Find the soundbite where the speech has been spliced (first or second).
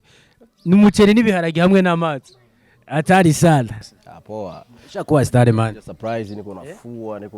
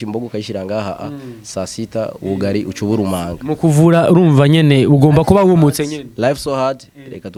first